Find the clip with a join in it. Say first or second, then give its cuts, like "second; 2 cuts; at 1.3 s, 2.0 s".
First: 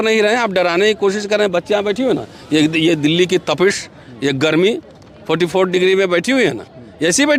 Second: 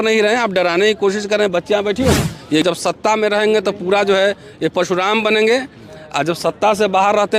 second; 1 cut; at 2.6 s